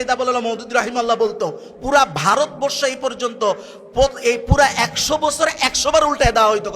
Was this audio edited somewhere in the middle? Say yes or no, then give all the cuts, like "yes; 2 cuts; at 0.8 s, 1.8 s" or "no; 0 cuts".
no; 0 cuts